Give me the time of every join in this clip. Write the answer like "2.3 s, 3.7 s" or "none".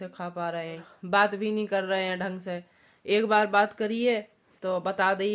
0.9 s